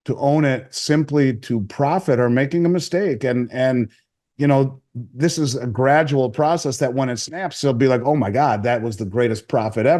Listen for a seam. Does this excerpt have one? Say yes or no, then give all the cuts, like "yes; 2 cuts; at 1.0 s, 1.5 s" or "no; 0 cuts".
no; 0 cuts